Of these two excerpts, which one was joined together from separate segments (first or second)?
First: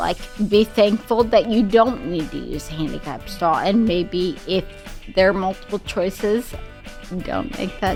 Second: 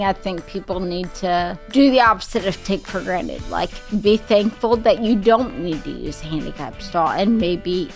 second